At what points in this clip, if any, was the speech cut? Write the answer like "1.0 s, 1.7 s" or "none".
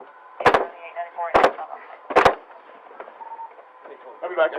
none